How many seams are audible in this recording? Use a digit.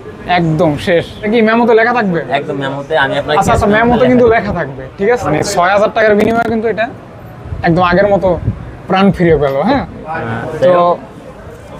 3